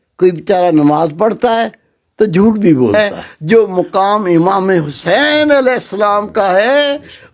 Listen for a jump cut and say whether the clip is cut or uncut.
cut